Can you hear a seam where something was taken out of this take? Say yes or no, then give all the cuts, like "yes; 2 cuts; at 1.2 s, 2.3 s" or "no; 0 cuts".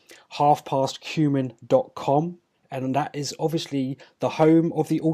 yes; 1 cut; at 1.5 s